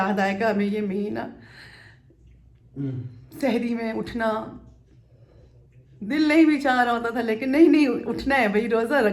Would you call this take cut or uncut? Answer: uncut